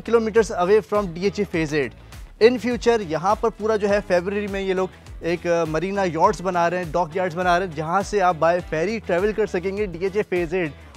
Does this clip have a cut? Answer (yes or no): no